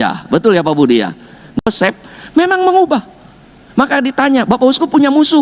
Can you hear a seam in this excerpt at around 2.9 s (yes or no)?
no